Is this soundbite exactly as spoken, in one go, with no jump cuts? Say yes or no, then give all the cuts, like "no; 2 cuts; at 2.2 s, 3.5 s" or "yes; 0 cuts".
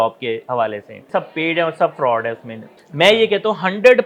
no; 2 cuts; at 1.1 s, 2.7 s